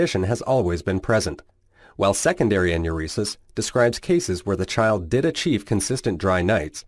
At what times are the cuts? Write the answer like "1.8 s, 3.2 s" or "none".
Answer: 1.8 s